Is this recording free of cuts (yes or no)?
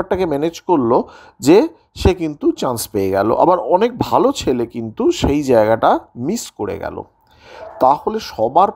yes